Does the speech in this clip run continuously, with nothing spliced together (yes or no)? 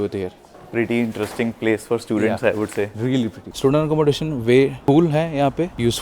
no